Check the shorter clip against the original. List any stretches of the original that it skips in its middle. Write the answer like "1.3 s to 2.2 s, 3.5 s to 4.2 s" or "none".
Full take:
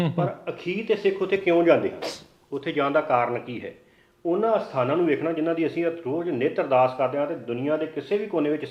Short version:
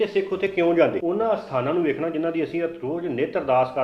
1.9 s to 4.2 s

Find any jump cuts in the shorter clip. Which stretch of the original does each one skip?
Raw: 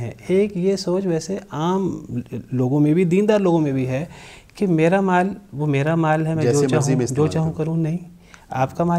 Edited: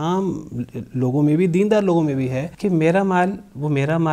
4.0 s to 4.4 s

